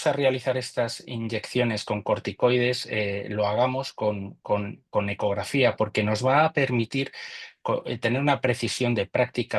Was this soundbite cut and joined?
no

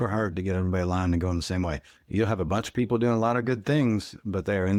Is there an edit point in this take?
no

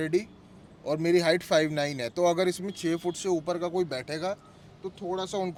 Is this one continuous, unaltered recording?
yes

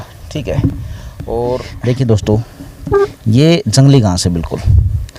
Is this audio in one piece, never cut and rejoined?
no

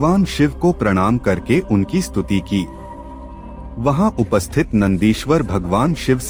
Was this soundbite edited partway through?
no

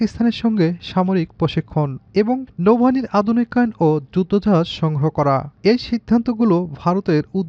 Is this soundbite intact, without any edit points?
no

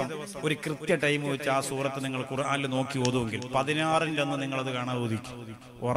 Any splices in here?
no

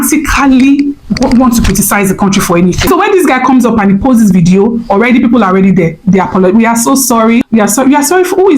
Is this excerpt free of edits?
no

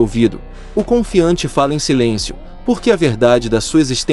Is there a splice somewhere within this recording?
no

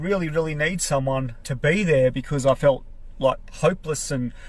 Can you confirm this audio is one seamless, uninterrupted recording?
no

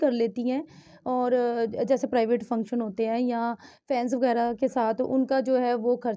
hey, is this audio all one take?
yes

